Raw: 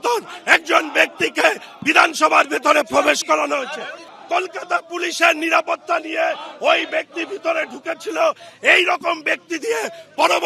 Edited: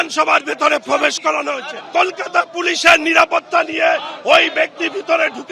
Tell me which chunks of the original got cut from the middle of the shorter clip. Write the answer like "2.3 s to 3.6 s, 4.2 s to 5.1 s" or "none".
3.8 s to 4.1 s